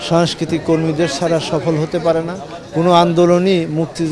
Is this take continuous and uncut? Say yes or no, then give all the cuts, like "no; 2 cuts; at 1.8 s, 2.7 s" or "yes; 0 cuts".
yes; 0 cuts